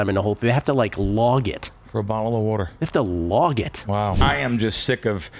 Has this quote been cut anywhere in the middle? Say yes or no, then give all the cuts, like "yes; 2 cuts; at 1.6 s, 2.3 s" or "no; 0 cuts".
yes; 1 cut; at 4.2 s